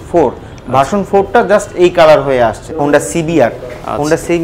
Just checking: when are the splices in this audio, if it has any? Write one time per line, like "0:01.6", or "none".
0:02.6